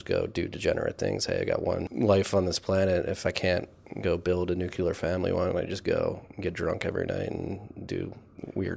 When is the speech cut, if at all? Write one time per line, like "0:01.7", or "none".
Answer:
0:01.9